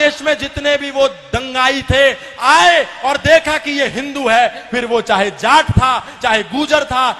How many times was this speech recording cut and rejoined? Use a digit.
0